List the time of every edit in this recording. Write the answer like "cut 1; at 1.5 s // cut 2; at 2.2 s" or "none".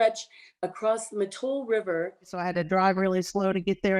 cut 1; at 2.4 s